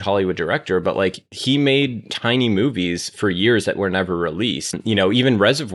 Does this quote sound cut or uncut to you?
cut